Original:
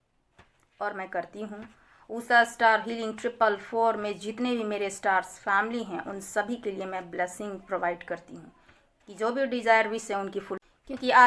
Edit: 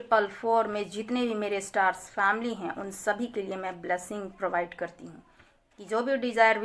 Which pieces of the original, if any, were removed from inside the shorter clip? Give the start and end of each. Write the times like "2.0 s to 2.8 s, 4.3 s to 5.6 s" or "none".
none